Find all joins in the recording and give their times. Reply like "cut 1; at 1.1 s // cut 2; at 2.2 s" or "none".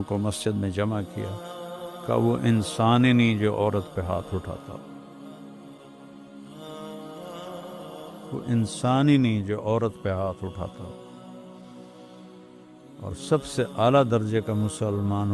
cut 1; at 5.1 s // cut 2; at 7.9 s // cut 3; at 10.9 s // cut 4; at 12.6 s

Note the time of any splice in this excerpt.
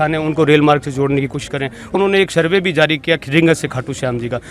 cut 1; at 1.9 s

